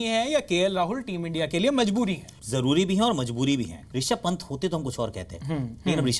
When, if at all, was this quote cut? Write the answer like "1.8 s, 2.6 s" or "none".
2.3 s, 3.8 s